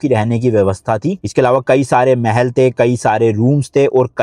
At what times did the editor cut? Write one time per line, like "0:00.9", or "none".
none